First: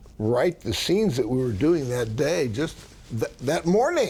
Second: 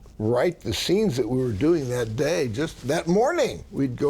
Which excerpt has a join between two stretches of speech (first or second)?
second